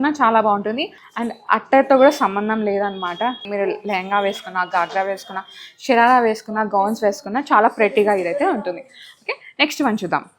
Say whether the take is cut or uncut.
uncut